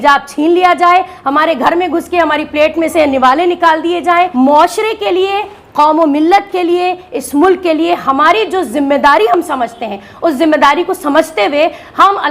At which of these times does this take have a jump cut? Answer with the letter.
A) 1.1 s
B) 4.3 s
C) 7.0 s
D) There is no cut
B